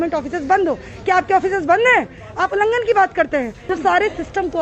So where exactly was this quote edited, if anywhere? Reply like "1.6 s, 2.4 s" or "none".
3.6 s